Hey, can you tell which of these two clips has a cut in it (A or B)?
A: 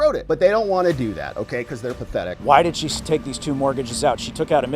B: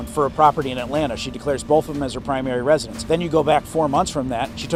A